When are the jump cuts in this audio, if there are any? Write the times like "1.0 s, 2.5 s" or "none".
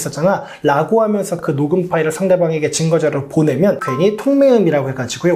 3.8 s